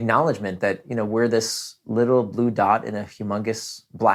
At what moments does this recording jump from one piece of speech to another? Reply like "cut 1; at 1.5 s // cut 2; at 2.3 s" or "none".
none